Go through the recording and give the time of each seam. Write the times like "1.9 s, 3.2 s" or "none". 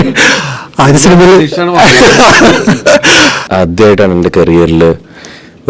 3.4 s

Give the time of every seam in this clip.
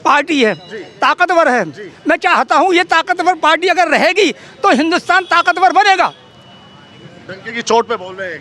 none

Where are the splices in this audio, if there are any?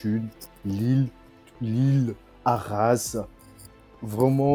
none

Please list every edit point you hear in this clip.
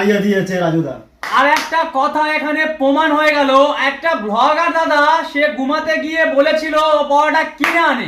1.2 s

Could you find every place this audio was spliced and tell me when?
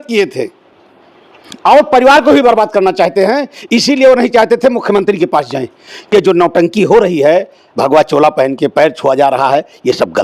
6.1 s

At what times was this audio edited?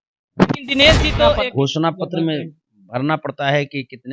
1.4 s

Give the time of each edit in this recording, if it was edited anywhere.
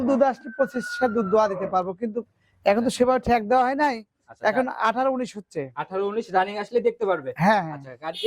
none

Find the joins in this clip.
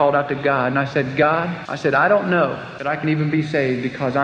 1.6 s, 2.7 s

